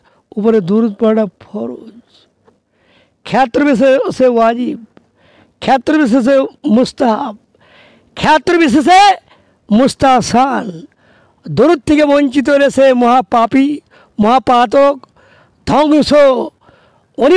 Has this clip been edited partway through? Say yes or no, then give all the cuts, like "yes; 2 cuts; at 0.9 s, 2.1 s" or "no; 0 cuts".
no; 0 cuts